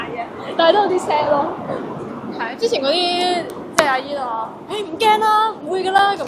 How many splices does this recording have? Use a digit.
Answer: 0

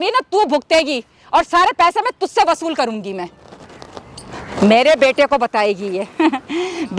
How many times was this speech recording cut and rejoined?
0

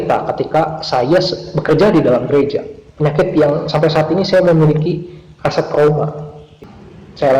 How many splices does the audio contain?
1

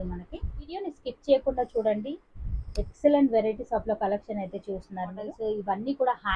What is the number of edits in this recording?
2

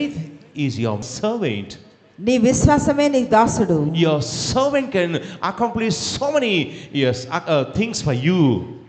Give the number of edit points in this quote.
1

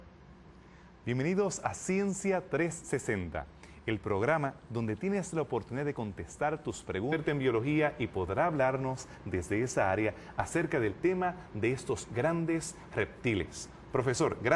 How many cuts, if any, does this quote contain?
0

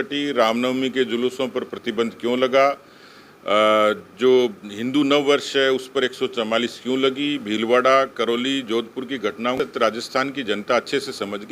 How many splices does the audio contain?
1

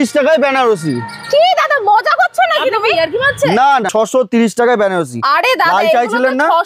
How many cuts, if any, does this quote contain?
1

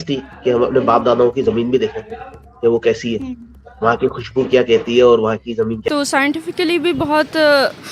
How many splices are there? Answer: 1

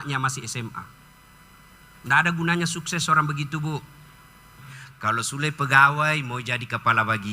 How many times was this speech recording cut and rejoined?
1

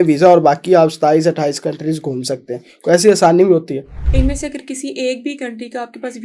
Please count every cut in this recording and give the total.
1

